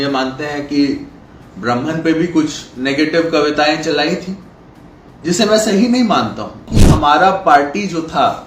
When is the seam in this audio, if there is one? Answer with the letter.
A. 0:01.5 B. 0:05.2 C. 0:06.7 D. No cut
C